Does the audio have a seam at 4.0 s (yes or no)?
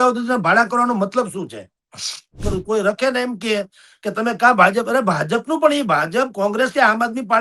no